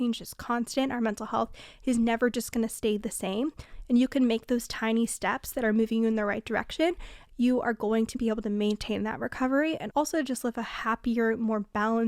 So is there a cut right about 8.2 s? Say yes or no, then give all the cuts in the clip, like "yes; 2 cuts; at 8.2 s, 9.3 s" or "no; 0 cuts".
yes; 2 cuts; at 7.1 s, 8.2 s